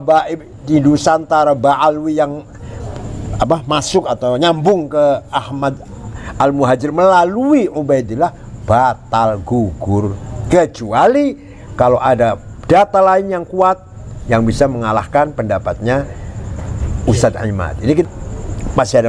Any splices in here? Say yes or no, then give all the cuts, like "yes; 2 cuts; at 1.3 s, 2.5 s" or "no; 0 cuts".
yes; 1 cut; at 18.0 s